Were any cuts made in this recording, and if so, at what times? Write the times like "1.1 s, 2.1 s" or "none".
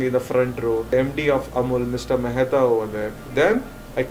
0.9 s, 3.2 s